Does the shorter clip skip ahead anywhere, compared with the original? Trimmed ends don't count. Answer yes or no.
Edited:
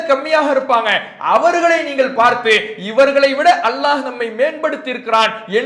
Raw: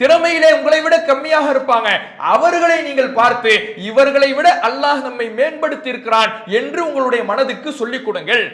no